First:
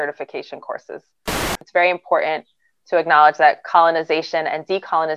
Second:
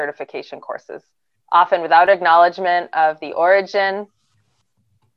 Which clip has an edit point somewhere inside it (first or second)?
first